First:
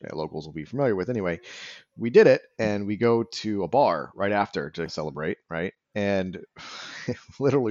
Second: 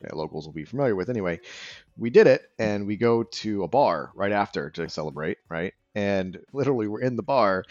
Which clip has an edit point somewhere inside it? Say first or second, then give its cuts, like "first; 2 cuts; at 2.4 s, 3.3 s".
second; 1 cut; at 6.4 s